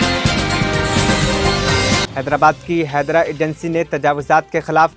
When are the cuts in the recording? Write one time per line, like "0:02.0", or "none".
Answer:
0:02.1